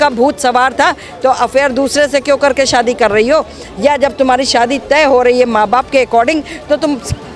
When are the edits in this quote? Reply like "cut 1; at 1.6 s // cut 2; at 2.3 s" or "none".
none